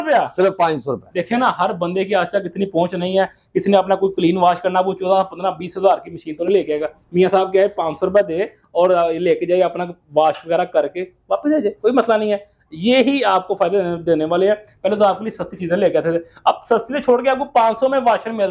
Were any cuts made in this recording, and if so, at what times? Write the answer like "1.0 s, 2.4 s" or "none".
none